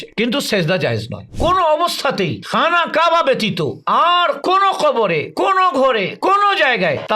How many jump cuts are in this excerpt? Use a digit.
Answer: 1